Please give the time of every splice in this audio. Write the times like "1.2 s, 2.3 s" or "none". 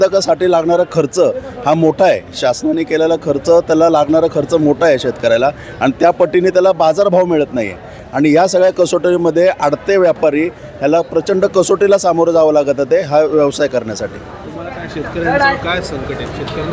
none